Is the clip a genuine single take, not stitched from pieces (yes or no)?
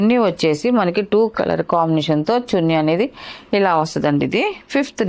yes